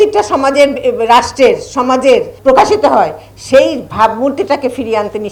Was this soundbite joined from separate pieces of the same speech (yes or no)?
no